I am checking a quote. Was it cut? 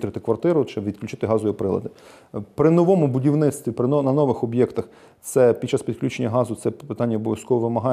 no; 0 cuts

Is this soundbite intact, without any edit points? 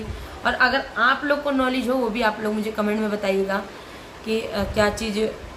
yes; 0 cuts

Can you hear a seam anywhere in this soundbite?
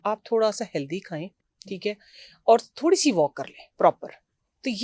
no; 0 cuts

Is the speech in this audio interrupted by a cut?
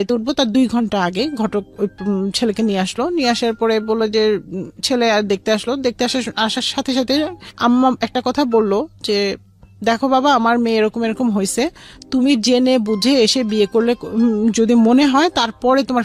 no; 0 cuts

